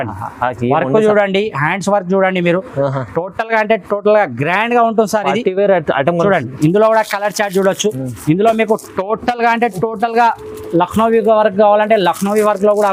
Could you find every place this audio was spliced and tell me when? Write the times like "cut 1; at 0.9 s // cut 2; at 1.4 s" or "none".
none

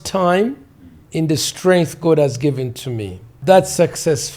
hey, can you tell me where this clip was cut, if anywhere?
cut 1; at 1.0 s // cut 2; at 3.3 s

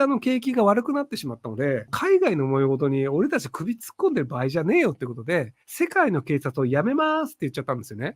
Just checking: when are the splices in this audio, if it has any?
cut 1; at 1.9 s // cut 2; at 5.6 s

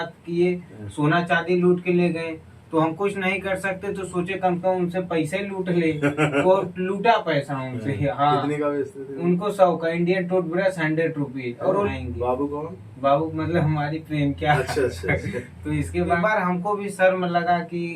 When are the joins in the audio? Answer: cut 1; at 11.9 s // cut 2; at 16.2 s

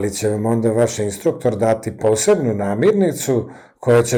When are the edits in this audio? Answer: none

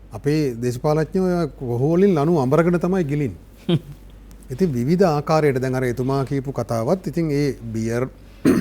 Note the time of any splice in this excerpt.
none

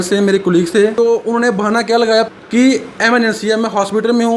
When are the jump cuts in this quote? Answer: cut 1; at 0.9 s // cut 2; at 2.3 s

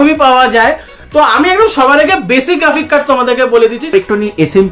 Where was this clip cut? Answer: cut 1; at 3.8 s

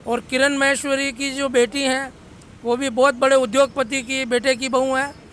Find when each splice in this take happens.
none

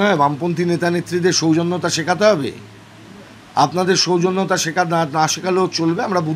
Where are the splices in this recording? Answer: none

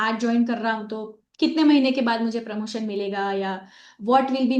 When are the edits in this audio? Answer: none

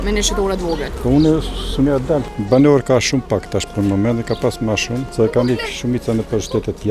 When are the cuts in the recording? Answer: cut 1; at 0.9 s // cut 2; at 2.2 s // cut 3; at 5.1 s

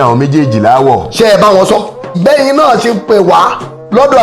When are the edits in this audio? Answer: cut 1; at 2.2 s

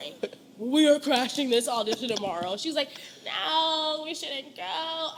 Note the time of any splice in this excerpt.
none

